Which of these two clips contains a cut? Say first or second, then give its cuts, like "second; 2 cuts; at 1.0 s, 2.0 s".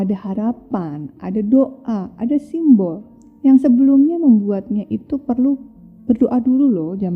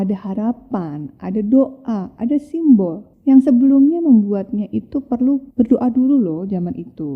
second; 2 cuts; at 3.0 s, 5.5 s